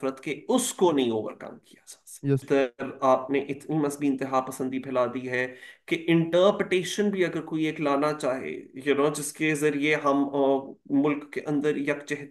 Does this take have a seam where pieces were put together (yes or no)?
yes